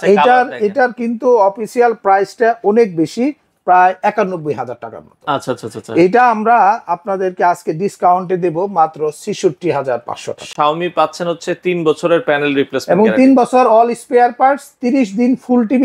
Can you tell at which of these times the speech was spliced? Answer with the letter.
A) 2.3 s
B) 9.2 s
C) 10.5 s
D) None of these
C